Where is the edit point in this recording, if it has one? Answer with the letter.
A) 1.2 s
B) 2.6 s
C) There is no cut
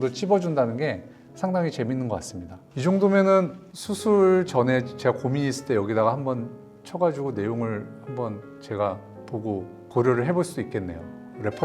B